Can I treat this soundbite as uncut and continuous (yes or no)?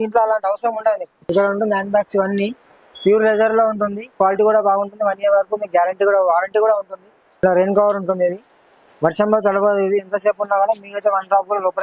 no